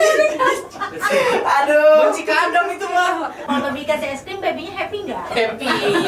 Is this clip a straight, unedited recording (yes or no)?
no